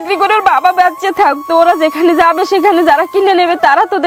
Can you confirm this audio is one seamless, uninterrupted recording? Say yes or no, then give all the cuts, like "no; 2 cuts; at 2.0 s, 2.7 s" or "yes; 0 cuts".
yes; 0 cuts